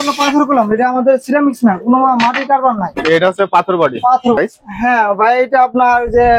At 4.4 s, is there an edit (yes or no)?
yes